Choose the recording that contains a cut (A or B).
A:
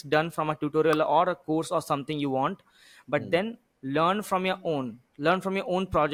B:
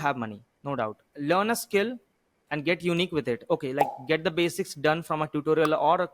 B